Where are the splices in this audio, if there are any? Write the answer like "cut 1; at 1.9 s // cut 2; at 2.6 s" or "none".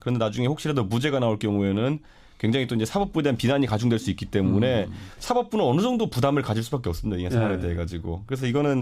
cut 1; at 6.6 s